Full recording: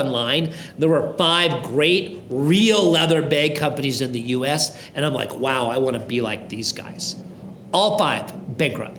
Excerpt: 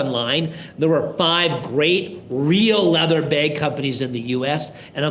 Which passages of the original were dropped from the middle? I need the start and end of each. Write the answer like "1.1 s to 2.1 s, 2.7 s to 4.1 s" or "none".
none